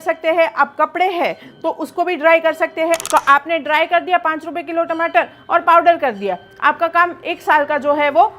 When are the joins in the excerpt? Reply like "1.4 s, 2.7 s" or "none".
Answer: 3.0 s